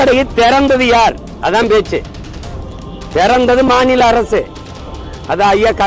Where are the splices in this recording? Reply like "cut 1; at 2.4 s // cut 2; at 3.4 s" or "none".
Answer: none